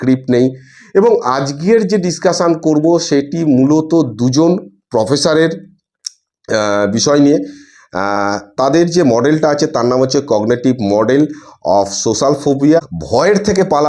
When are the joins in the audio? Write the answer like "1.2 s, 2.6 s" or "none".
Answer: 12.8 s